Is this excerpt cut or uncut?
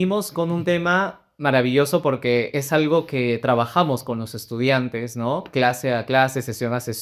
uncut